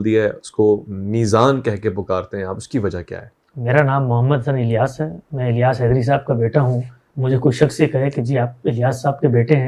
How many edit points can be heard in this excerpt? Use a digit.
0